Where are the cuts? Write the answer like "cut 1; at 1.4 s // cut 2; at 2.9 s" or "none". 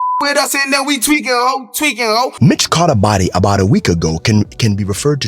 cut 1; at 2.3 s